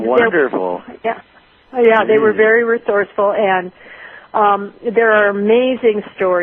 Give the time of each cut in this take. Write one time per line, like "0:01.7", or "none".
none